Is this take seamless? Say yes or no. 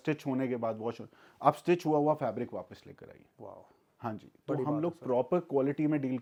yes